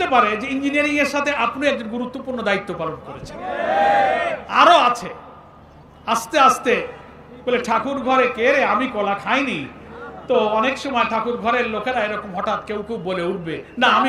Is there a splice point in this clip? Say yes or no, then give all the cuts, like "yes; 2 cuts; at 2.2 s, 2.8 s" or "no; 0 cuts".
no; 0 cuts